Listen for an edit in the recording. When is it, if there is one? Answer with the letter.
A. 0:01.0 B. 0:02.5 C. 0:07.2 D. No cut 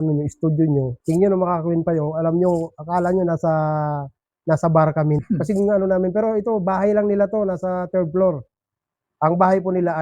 A